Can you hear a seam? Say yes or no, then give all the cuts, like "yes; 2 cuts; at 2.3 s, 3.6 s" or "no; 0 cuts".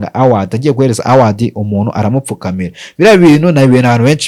no; 0 cuts